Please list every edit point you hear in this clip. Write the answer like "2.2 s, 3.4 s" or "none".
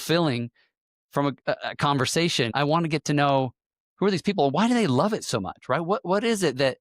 2.5 s